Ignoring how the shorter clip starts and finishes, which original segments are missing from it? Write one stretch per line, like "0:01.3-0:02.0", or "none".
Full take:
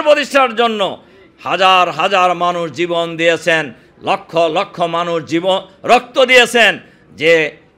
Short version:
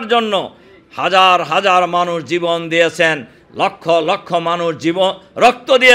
none